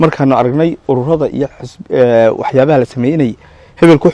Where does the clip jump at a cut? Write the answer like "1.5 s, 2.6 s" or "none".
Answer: none